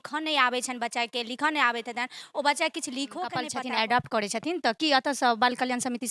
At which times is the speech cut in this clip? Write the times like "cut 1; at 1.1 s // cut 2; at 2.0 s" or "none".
cut 1; at 3.4 s